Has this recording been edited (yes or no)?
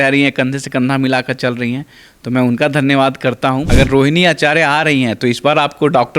yes